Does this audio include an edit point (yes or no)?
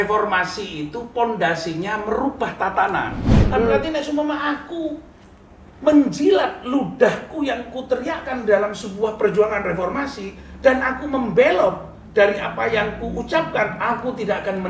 yes